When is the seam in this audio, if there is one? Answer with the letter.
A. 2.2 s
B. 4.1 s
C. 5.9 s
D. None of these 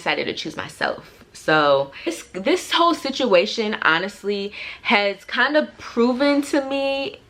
A